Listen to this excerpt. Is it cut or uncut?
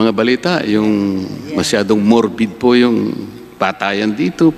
uncut